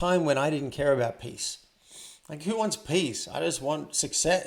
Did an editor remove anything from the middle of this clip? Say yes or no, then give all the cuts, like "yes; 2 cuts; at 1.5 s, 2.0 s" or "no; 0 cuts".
no; 0 cuts